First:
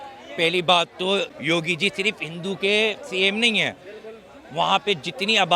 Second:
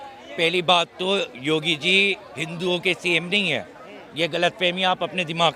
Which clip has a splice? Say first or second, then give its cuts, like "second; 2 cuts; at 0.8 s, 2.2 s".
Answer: first; 1 cut; at 1.3 s